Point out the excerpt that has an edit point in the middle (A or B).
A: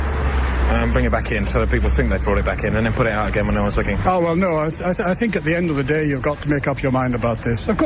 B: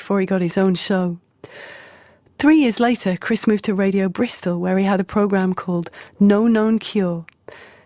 B